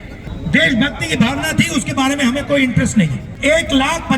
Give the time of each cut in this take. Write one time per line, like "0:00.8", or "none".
0:03.2